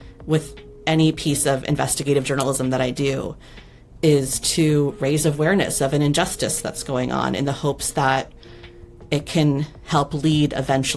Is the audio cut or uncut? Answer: uncut